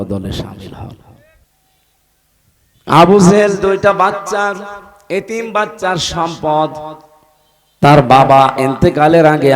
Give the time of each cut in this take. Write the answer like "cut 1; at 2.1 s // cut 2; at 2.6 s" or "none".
cut 1; at 1.5 s